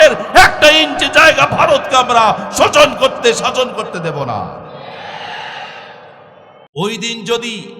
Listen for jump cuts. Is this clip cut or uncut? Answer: cut